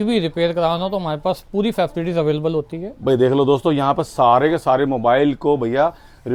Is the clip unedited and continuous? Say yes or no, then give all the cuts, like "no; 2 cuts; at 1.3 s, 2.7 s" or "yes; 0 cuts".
yes; 0 cuts